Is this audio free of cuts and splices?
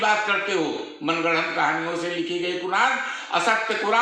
yes; 0 cuts

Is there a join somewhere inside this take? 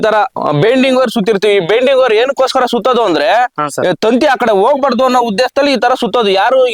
no; 0 cuts

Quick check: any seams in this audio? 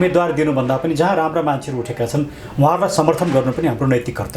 no; 0 cuts

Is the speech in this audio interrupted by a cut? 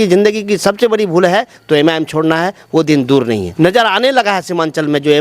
yes; 1 cut; at 3.5 s

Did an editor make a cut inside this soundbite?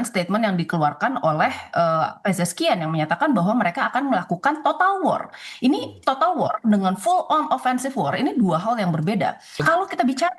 yes; 1 cut; at 9.5 s

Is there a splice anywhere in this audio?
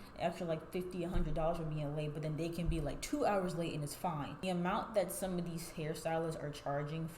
yes; 1 cut; at 4.4 s

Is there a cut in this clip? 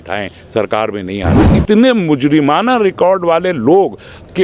yes; 1 cut; at 1.5 s

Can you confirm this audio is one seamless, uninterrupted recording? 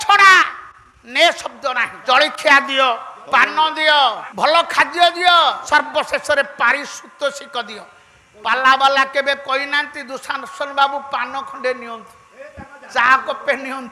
no; 4 cuts; at 1.9 s, 3.1 s, 4.2 s, 5.6 s

